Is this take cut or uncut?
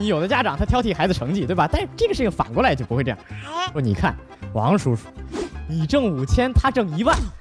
cut